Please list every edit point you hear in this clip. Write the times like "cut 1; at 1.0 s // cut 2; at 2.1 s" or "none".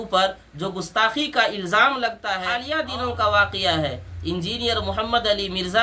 cut 1; at 2.5 s